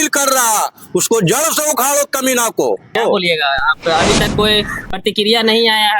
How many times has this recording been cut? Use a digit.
1